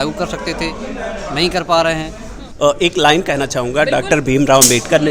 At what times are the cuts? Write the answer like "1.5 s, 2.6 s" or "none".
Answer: 2.4 s